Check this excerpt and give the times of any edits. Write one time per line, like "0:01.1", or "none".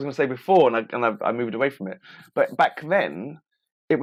none